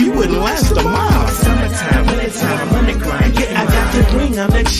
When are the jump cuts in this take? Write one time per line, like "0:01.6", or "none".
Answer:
none